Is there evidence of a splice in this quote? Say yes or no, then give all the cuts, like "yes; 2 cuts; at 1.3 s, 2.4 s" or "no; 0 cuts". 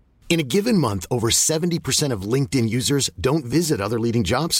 no; 0 cuts